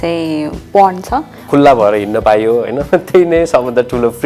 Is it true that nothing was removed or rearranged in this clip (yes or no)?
no